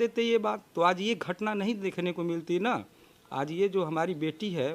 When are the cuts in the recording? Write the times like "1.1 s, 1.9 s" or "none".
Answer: none